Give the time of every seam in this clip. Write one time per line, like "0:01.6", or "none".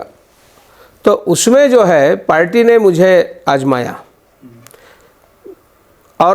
none